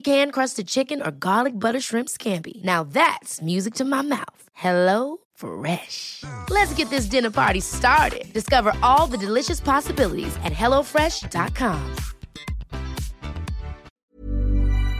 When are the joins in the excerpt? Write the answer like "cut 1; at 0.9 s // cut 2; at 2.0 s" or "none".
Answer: cut 1; at 13.8 s

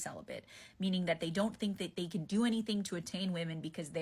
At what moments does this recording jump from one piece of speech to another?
none

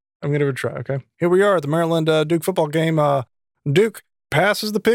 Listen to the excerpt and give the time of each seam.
cut 1; at 1.1 s

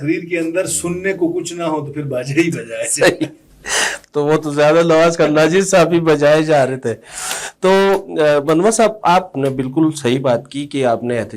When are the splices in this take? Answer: none

